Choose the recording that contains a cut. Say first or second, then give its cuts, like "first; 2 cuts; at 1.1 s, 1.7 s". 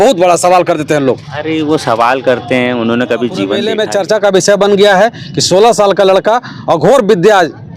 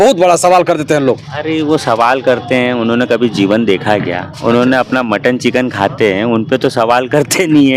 first; 1 cut; at 3.6 s